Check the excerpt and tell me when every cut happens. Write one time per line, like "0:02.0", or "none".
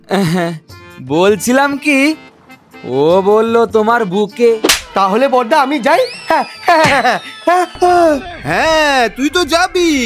0:04.8